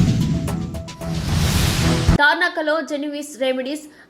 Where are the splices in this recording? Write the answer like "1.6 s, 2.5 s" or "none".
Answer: 2.1 s